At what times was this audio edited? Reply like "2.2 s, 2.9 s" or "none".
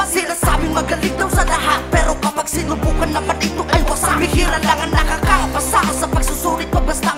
none